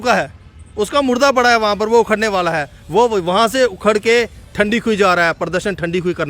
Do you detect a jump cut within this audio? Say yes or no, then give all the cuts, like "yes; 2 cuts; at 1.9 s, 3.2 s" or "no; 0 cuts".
no; 0 cuts